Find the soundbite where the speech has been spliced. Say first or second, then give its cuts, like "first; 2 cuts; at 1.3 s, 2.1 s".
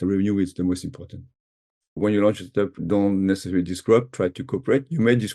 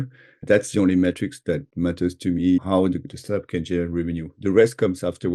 first; 1 cut; at 2.0 s